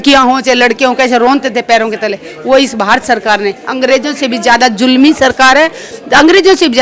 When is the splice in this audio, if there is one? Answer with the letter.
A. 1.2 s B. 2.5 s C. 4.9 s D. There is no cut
D